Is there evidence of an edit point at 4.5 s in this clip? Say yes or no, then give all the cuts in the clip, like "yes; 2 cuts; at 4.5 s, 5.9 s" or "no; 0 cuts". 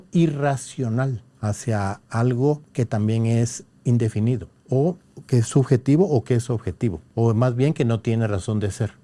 yes; 5 cuts; at 1.3 s, 2.7 s, 4.5 s, 5.1 s, 7.0 s